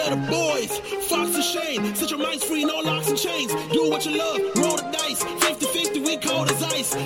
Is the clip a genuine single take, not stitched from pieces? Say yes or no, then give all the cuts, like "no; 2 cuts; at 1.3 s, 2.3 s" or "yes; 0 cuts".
yes; 0 cuts